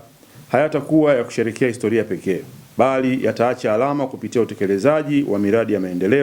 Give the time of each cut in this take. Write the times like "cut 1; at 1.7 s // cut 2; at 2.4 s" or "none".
none